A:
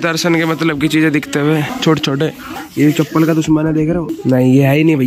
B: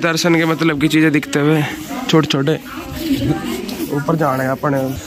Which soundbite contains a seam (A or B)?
A